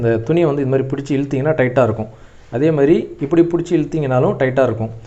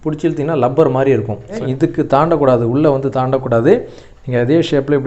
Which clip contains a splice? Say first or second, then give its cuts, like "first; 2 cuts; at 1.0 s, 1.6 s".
second; 1 cut; at 1.6 s